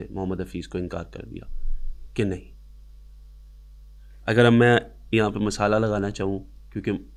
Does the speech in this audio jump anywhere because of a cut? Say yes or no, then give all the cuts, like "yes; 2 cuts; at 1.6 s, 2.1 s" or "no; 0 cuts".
no; 0 cuts